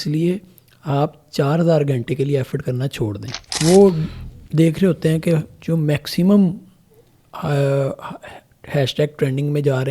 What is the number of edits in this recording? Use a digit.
1